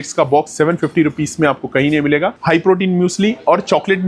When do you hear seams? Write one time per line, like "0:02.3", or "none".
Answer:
0:02.4

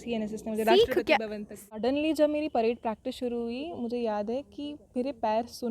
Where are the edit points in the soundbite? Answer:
0:01.6

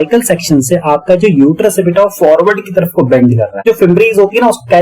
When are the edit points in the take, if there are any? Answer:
0:03.6

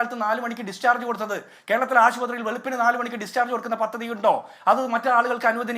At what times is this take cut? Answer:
none

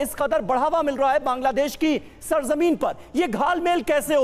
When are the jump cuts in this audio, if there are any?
none

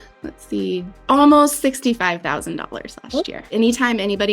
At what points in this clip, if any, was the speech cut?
0:00.9
0:03.5

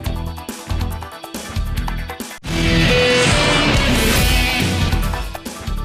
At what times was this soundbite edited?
none

